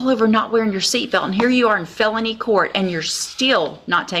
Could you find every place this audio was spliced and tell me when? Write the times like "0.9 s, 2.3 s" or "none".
none

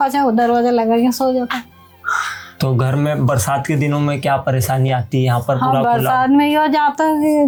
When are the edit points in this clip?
none

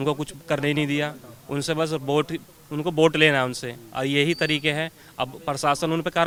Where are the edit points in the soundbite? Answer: none

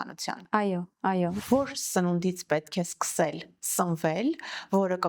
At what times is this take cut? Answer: 1.4 s

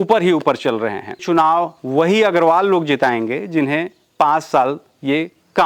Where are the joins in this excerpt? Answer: 1.2 s

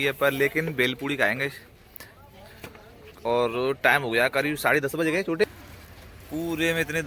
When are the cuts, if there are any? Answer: 5.4 s

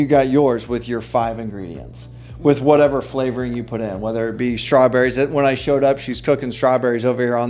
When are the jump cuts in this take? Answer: none

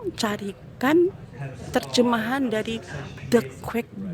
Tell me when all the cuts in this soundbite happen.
3.1 s

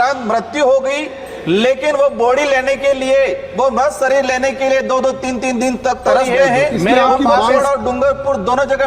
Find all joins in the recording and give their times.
7.5 s

